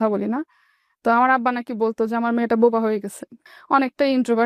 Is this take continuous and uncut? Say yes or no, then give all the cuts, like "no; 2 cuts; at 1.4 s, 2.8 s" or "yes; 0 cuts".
yes; 0 cuts